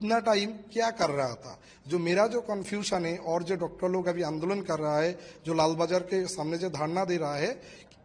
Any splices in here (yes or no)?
no